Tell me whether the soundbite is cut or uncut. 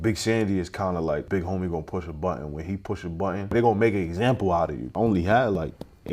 cut